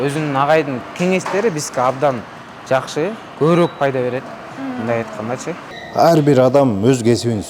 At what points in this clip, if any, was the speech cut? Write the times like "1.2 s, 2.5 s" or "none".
5.7 s